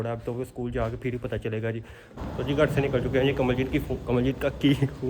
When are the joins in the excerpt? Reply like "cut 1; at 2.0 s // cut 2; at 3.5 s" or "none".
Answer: cut 1; at 2.2 s